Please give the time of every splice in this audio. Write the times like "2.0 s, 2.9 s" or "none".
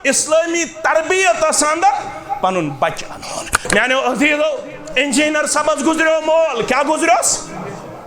3.6 s

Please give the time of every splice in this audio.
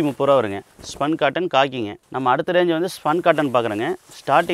2.0 s

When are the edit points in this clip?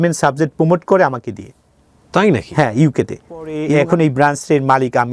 3.6 s

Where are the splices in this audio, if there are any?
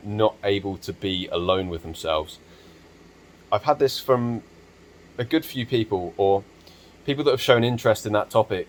none

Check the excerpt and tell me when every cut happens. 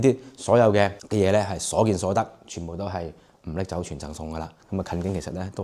1.0 s, 4.5 s

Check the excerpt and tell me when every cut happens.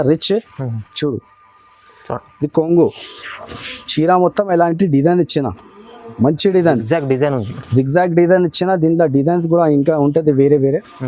none

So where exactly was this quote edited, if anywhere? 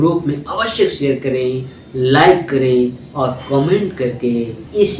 none

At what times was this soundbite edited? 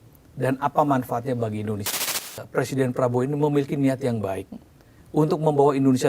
2.4 s

